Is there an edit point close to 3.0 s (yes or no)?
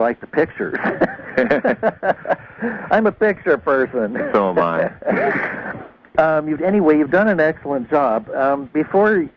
yes